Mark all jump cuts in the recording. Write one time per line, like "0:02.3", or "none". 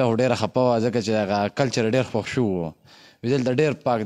none